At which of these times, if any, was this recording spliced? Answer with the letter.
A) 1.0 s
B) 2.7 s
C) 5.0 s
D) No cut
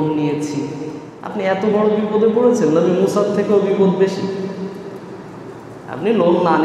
A